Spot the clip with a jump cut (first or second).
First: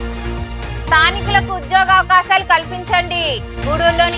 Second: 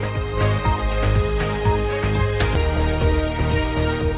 second